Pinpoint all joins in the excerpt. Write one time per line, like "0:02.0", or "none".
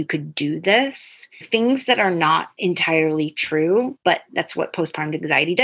0:01.5
0:02.5
0:04.2